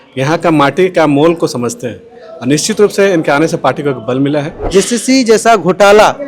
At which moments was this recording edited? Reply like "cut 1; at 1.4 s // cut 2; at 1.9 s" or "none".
cut 1; at 4.6 s

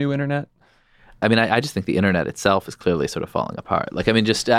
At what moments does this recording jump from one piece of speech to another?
cut 1; at 1.2 s

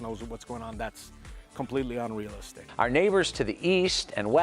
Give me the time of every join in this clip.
cut 1; at 2.6 s

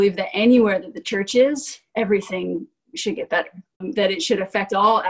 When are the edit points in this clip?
cut 1; at 3.8 s

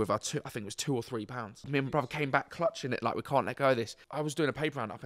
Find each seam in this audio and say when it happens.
cut 1; at 1.7 s // cut 2; at 4.0 s

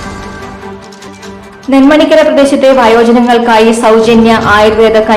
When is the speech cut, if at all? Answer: cut 1; at 0.9 s

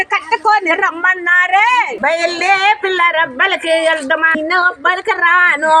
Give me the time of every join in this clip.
cut 1; at 1.9 s // cut 2; at 4.3 s

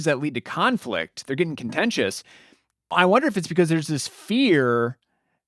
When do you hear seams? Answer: cut 1; at 2.9 s

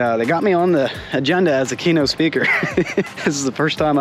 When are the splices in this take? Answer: none

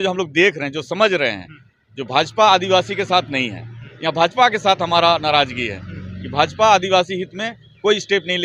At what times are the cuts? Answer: none

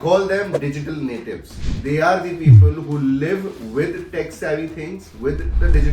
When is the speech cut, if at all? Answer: cut 1; at 1.5 s

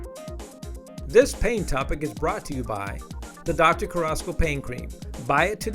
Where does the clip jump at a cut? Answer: cut 1; at 1.1 s

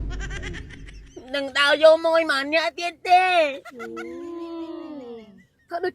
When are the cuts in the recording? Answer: cut 1; at 1.0 s

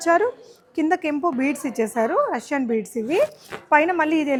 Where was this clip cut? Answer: none

